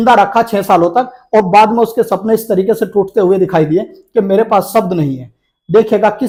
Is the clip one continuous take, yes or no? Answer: yes